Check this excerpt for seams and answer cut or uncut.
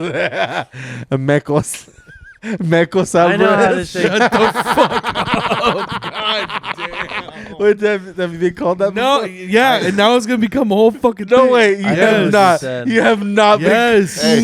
uncut